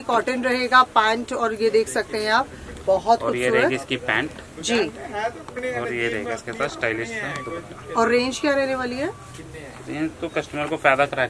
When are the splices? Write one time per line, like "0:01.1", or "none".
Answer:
none